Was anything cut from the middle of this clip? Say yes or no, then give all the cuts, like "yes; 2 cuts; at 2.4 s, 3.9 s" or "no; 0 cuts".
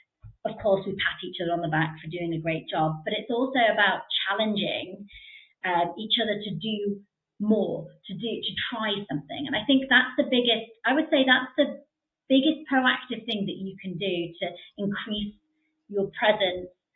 no; 0 cuts